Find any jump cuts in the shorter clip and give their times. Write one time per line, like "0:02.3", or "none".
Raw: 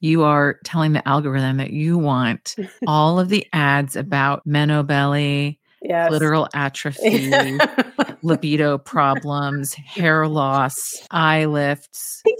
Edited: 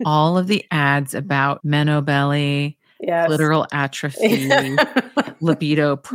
none